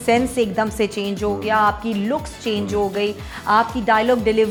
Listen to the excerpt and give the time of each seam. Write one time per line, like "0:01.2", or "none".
none